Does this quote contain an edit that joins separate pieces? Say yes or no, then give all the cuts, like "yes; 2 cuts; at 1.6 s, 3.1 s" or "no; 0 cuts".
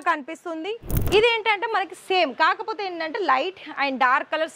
yes; 1 cut; at 0.9 s